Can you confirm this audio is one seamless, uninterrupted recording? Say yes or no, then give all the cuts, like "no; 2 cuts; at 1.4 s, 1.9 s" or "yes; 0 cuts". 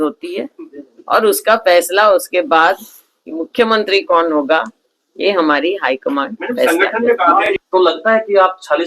no; 1 cut; at 7.5 s